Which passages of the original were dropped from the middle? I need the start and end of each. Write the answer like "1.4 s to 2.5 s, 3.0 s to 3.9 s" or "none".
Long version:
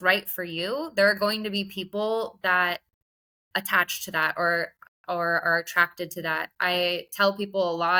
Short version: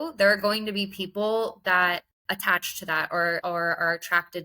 2.9 s to 3.4 s, 4.7 s to 5.1 s